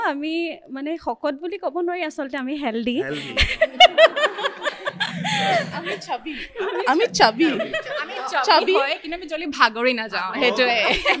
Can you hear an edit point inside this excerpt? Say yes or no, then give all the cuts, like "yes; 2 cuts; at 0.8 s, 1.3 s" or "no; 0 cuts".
no; 0 cuts